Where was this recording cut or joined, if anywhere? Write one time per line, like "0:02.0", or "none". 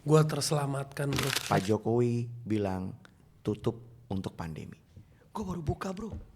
0:01.3